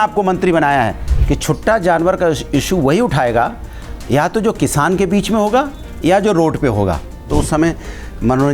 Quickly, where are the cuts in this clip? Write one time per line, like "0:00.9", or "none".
0:01.1
0:07.2